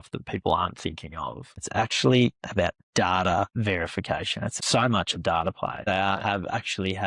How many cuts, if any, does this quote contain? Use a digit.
3